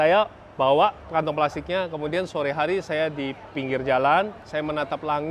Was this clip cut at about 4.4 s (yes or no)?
yes